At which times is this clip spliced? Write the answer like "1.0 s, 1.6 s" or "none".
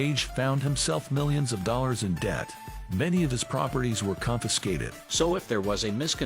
5.0 s

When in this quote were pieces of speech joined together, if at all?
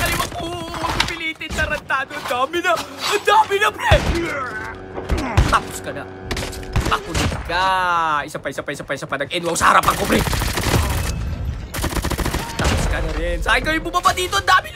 none

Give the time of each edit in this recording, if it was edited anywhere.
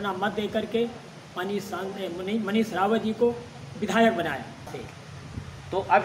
4.7 s

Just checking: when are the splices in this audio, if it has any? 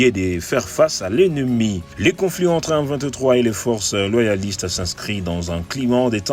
1.9 s

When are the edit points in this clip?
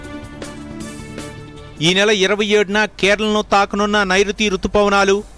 none

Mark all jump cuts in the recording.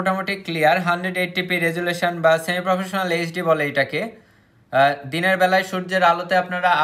none

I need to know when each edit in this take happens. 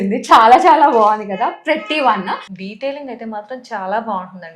2.5 s

